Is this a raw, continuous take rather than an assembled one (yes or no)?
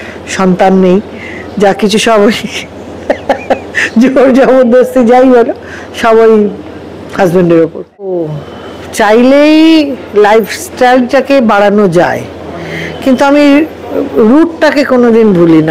no